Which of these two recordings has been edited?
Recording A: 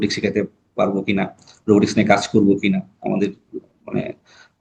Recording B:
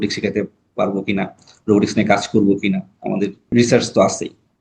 B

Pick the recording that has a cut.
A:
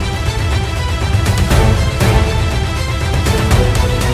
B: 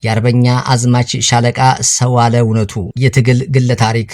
B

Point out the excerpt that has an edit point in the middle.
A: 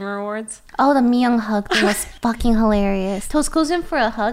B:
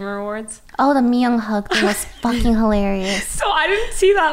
A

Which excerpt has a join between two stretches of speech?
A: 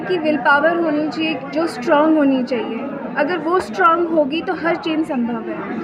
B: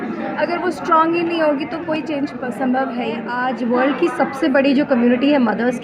B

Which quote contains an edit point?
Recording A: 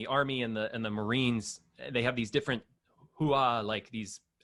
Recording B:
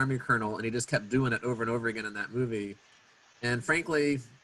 B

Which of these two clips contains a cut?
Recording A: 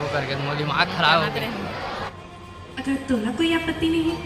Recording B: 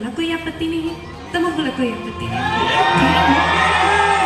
A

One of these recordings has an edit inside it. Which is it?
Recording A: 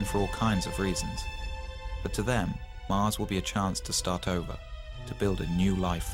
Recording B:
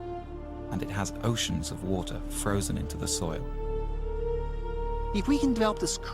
B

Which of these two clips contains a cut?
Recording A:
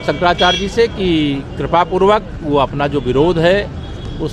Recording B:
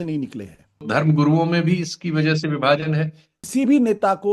B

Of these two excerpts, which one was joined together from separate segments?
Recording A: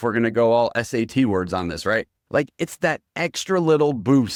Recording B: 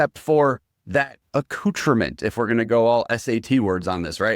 B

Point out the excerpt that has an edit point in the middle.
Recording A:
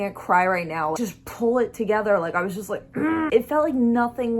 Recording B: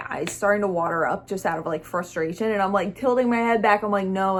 A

